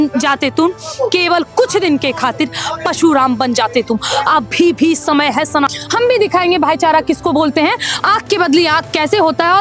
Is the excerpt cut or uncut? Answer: cut